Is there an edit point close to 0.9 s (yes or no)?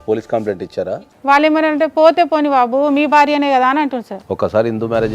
yes